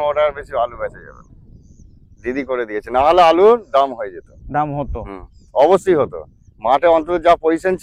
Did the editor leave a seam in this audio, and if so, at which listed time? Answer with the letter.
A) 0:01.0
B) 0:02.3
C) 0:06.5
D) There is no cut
D